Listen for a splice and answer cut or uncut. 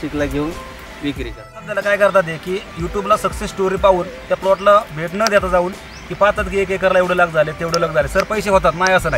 cut